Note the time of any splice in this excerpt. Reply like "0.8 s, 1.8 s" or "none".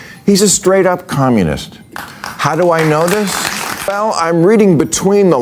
3.9 s